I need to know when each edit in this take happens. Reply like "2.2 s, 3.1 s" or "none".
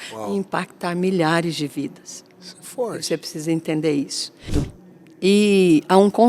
4.6 s